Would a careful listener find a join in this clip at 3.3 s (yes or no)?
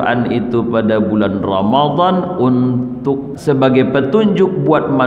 yes